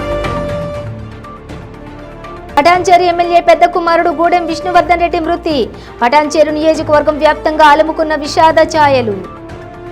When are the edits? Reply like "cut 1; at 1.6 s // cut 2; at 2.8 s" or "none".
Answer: cut 1; at 0.9 s